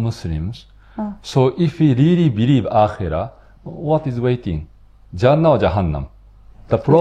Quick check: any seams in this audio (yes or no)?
no